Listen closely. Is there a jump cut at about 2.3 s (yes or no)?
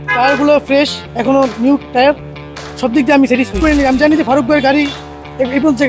no